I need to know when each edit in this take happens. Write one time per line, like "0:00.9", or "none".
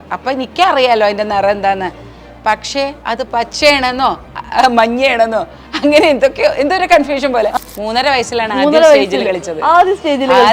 0:07.5